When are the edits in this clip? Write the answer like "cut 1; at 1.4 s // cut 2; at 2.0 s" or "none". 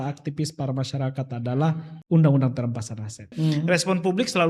cut 1; at 1.9 s // cut 2; at 3.3 s